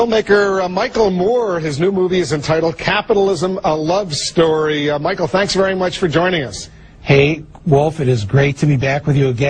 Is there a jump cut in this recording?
no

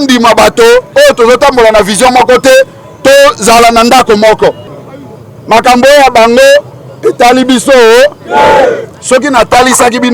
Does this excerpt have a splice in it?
yes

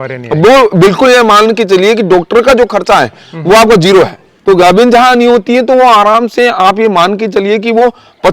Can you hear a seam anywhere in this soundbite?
yes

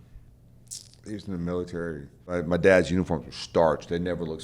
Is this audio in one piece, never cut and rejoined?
no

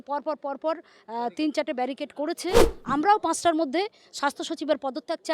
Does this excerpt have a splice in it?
yes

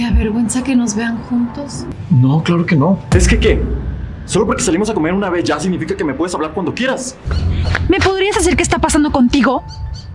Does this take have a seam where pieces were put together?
yes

